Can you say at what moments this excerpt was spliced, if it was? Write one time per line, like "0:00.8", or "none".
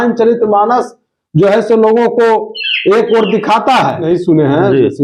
0:04.0